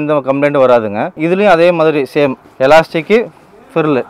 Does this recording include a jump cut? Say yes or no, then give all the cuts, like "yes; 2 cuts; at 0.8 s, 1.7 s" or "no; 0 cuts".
yes; 1 cut; at 1.2 s